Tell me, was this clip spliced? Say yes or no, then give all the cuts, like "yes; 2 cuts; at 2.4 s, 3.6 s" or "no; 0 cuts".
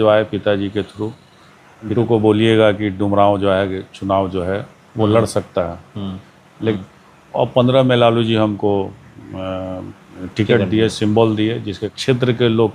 yes; 3 cuts; at 1.9 s, 6.7 s, 11.8 s